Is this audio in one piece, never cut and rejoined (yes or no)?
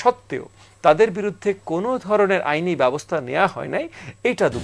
yes